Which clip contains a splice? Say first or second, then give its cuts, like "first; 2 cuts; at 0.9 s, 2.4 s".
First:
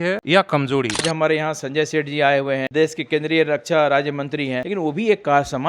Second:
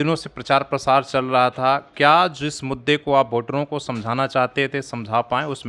first; 3 cuts; at 1.0 s, 2.7 s, 4.6 s